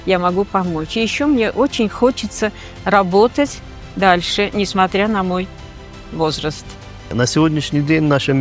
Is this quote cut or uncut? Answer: cut